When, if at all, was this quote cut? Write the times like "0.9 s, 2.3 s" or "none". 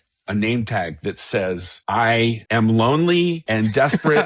1.7 s, 2.4 s, 3.4 s